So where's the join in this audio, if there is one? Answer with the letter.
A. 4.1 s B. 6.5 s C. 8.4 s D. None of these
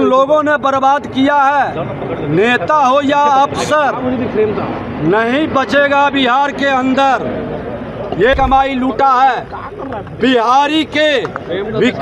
C